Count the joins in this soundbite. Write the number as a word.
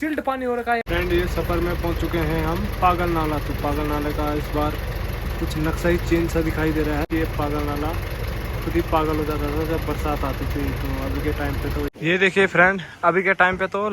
three